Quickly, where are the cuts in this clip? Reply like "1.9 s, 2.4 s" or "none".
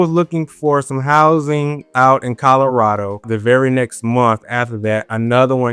3.3 s